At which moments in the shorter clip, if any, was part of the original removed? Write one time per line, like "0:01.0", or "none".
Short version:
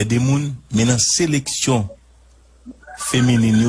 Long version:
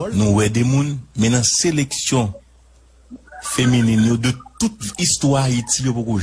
none